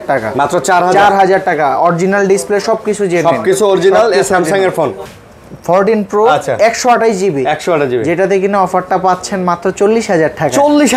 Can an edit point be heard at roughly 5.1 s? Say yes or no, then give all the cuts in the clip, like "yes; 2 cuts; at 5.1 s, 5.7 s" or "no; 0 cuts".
yes; 1 cut; at 5.1 s